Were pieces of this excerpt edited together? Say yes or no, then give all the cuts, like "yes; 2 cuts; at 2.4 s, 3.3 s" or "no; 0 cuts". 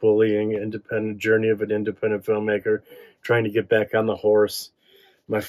no; 0 cuts